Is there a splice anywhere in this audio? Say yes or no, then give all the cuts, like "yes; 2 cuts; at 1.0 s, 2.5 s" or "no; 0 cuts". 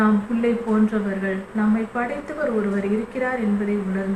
no; 0 cuts